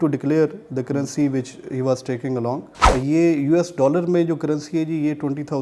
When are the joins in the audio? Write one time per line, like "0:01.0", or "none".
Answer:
0:02.8